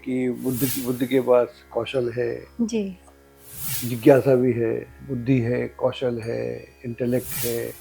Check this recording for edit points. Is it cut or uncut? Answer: uncut